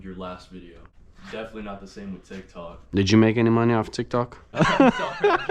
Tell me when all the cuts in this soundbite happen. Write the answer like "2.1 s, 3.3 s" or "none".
1.0 s, 4.5 s